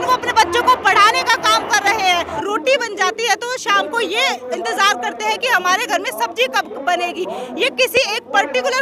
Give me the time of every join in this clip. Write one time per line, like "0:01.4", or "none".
0:02.3

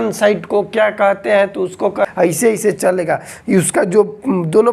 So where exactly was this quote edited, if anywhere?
0:02.0

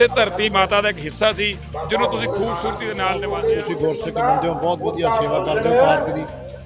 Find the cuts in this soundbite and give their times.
0:03.0

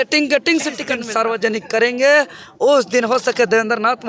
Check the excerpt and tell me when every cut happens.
0:00.9

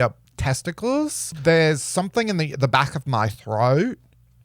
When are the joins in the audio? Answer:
0:01.3

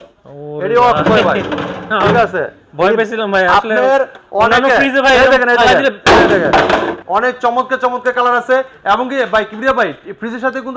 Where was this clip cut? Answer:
0:07.0

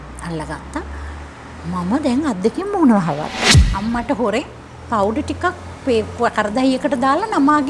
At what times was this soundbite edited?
0:03.6

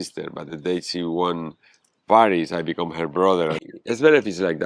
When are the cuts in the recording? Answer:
0:03.6

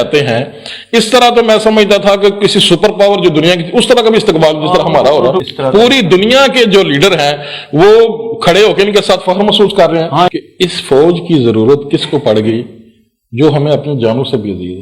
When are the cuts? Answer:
0:05.4
0:10.3

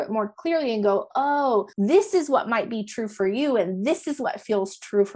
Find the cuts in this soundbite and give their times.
0:01.7

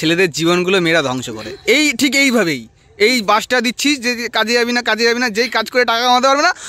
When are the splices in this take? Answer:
none

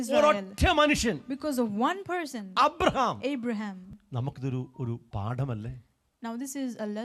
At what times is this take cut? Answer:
0:03.8

